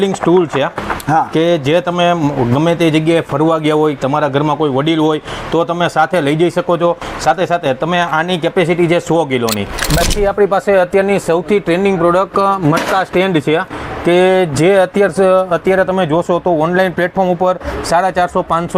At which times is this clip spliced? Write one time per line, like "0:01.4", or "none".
0:10.0